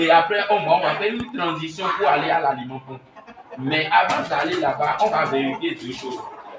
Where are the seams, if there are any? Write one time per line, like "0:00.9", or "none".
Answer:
none